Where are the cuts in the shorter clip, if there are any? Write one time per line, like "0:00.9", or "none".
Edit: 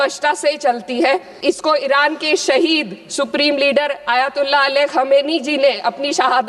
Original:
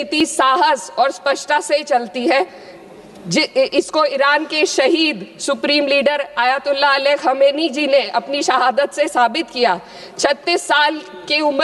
0:01.4